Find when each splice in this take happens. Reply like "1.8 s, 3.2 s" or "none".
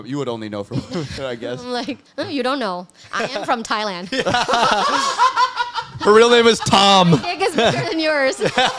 none